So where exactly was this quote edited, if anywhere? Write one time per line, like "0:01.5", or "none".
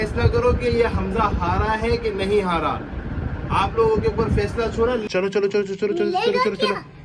0:05.0